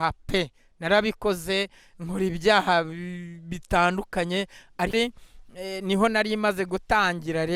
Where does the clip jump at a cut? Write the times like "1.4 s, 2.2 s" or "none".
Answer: 4.9 s